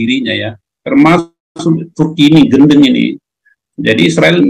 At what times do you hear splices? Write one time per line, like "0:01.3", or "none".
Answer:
none